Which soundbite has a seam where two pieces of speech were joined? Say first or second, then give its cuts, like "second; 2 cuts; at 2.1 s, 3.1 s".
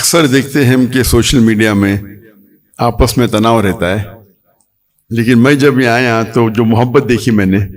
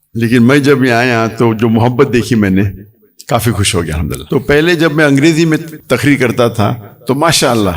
second; 2 cuts; at 4.2 s, 5.7 s